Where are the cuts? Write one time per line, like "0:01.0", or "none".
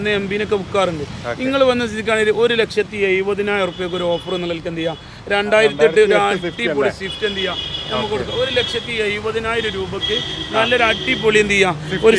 none